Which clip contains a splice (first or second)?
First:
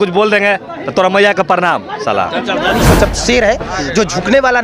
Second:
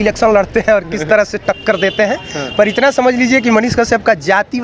first